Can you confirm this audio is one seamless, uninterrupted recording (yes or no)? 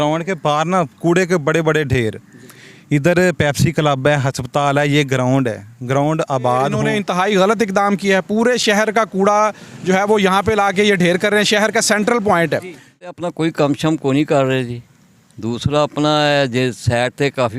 no